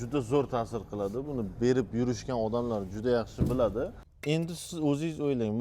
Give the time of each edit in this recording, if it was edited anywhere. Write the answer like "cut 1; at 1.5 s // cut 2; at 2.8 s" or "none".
cut 1; at 4.1 s